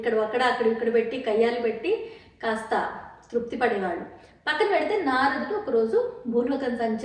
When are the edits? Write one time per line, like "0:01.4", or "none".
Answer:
none